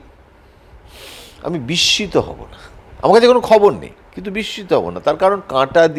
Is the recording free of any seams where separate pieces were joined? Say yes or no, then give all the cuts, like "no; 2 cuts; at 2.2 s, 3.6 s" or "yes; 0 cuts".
yes; 0 cuts